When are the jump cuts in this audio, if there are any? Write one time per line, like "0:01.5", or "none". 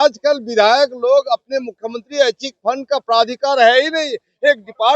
none